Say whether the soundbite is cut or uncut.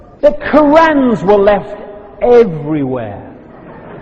cut